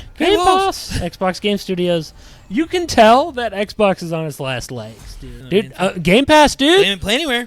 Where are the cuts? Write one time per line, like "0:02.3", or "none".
0:05.3